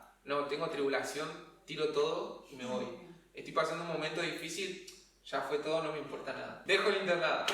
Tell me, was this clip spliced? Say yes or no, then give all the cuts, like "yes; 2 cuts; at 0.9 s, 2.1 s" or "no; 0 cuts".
yes; 1 cut; at 6.5 s